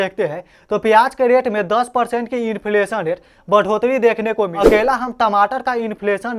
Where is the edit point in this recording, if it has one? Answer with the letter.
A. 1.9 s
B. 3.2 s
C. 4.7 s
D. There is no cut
C